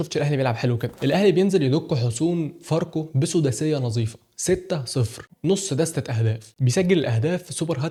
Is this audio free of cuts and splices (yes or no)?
yes